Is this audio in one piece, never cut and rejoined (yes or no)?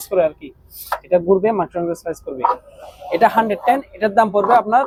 yes